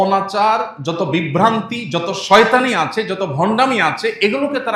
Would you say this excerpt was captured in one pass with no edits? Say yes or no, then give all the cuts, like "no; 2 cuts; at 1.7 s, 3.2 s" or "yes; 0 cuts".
yes; 0 cuts